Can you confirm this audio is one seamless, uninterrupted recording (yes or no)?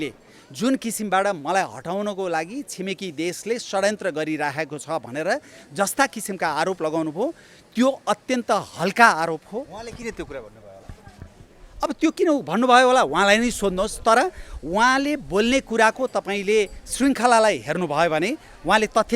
yes